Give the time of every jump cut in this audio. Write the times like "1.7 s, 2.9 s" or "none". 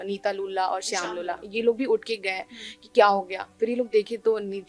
none